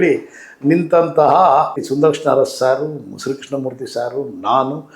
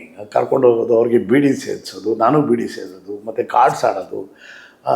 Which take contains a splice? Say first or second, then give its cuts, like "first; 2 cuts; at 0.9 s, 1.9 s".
first; 1 cut; at 1.8 s